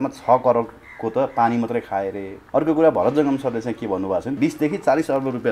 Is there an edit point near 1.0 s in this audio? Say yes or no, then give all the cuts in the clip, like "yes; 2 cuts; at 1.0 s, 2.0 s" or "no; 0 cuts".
no; 2 cuts; at 2.3 s, 4.3 s